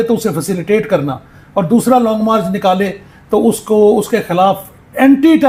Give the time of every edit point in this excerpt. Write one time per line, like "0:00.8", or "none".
none